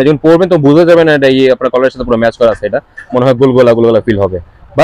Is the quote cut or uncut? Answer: uncut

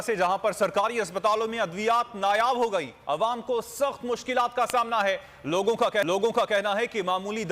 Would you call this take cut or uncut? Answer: uncut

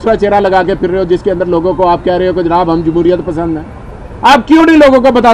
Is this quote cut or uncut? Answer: uncut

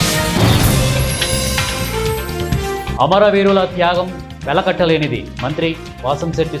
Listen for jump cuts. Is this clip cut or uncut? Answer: uncut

